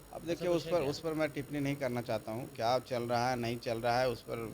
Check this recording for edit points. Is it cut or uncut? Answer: uncut